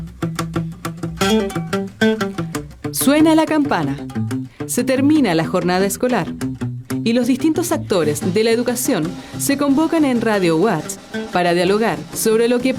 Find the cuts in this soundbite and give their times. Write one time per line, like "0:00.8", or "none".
none